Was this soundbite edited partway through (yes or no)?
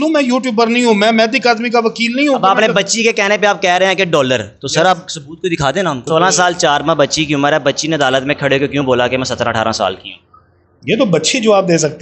yes